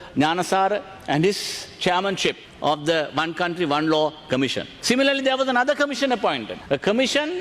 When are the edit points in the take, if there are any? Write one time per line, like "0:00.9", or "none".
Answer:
0:02.5
0:04.7
0:06.5

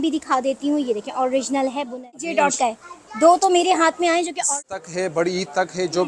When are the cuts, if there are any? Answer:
0:02.2
0:04.5

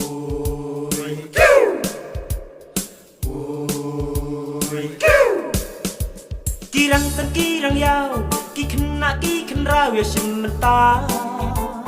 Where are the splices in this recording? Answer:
0:05.7

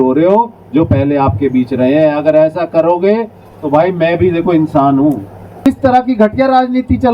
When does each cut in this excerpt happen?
0:05.7

